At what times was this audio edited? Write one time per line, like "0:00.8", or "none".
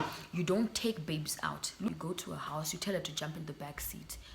0:01.9